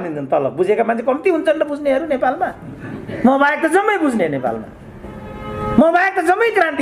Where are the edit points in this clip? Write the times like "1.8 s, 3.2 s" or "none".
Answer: none